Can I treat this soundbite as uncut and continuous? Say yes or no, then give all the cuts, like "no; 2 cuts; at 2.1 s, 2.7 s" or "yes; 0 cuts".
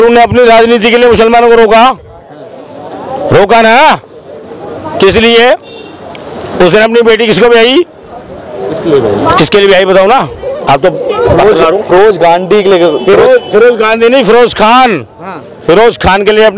yes; 0 cuts